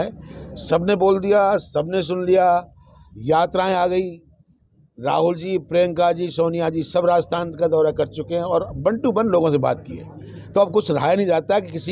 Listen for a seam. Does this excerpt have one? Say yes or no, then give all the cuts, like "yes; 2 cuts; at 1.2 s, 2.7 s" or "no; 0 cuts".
no; 0 cuts